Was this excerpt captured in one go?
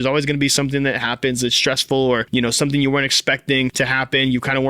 no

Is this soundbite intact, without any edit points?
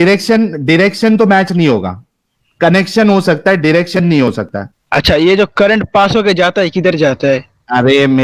yes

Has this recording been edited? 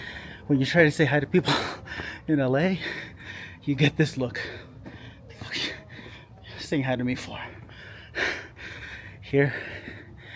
no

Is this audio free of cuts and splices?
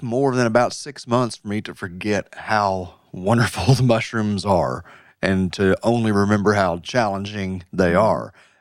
yes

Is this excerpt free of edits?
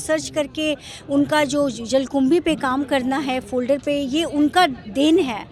yes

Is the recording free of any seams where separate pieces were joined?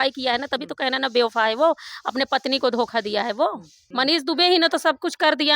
no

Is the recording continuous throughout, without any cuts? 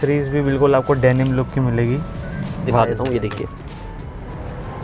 no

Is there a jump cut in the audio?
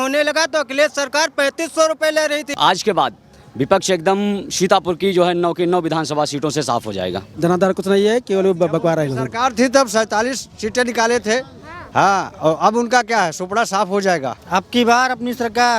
yes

